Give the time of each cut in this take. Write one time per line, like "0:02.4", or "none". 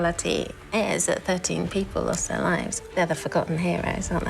0:02.7